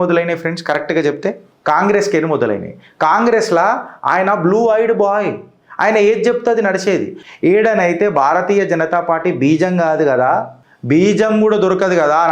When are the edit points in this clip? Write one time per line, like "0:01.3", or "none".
0:01.5
0:07.2